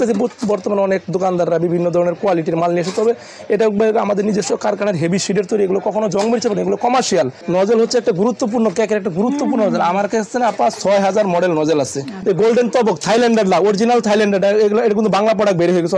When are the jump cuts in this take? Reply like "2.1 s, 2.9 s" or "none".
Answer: 7.4 s, 12.1 s